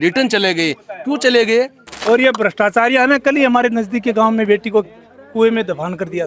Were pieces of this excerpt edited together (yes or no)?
yes